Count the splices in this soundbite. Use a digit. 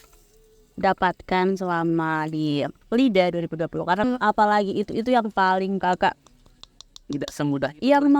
2